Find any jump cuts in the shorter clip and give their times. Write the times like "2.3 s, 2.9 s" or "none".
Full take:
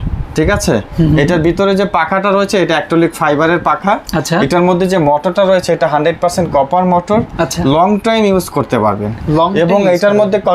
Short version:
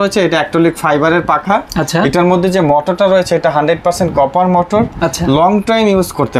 none